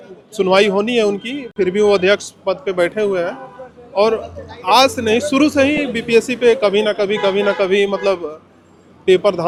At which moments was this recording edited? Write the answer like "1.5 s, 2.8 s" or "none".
none